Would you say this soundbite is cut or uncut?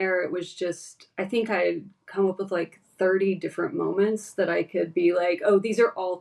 uncut